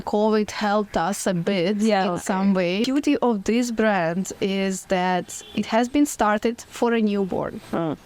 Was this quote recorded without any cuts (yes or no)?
no